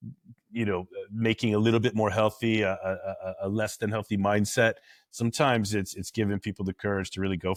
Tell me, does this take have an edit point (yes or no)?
no